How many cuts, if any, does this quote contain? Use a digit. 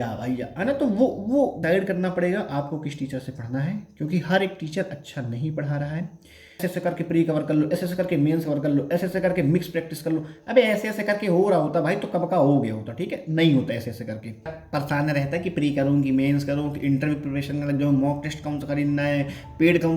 3